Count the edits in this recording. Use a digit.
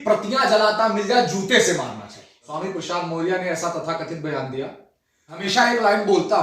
2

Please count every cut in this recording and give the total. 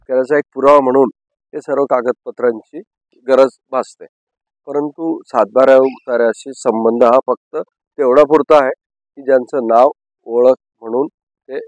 1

